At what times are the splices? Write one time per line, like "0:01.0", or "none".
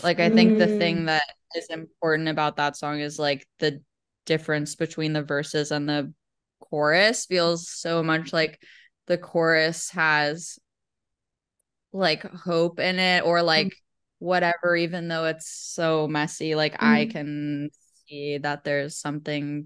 none